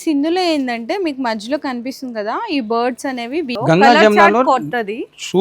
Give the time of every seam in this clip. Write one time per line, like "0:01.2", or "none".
0:03.5